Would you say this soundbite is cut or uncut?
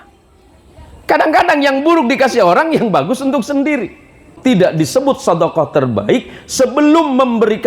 cut